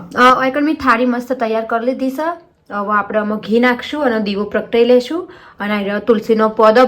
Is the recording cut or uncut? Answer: uncut